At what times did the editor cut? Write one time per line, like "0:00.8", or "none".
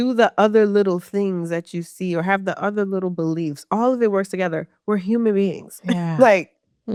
none